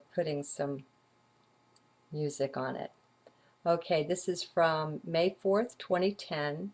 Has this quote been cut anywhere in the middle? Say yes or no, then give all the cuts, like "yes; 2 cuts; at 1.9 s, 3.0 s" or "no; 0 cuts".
no; 0 cuts